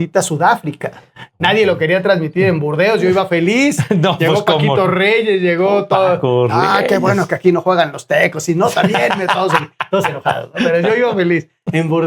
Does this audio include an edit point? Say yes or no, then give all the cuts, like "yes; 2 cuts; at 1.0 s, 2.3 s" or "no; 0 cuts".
no; 0 cuts